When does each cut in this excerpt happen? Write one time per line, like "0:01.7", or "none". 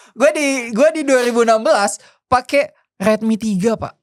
none